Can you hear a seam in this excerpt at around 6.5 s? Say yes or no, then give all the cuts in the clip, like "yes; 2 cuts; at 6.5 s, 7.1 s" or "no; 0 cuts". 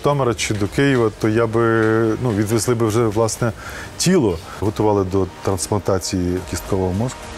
yes; 2 cuts; at 4.6 s, 6.5 s